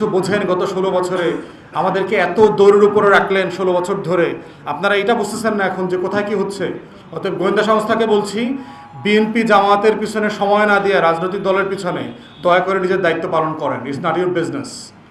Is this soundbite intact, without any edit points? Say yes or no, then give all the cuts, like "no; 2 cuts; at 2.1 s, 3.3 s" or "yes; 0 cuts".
yes; 0 cuts